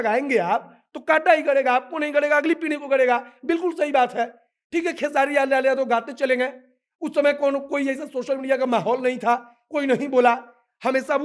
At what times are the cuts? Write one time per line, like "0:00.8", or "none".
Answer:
none